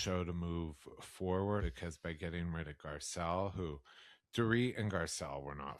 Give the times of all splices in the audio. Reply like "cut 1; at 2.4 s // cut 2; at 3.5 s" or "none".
cut 1; at 1.6 s